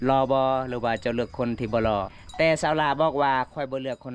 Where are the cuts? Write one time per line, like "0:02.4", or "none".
0:02.2